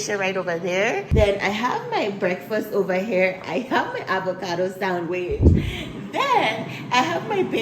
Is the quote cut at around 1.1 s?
yes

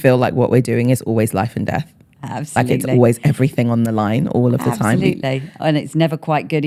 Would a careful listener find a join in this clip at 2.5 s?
no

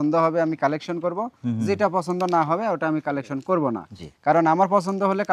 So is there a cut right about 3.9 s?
no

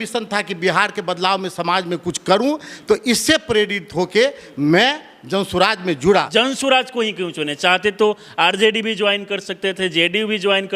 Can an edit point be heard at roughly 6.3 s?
yes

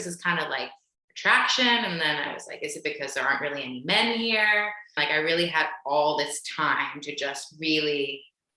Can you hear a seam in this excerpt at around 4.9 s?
yes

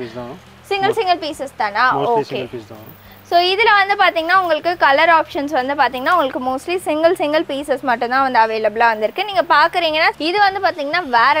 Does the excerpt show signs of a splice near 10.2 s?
yes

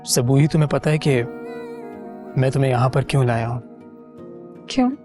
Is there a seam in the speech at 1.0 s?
no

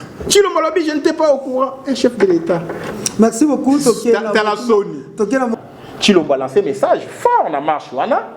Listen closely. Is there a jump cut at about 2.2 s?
no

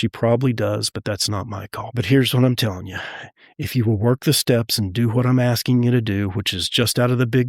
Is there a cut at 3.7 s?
no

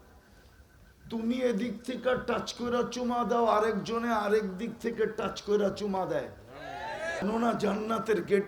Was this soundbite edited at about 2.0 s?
no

